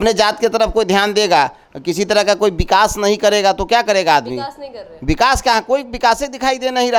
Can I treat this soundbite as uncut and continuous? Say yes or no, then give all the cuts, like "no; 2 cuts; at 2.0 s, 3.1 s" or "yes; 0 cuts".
yes; 0 cuts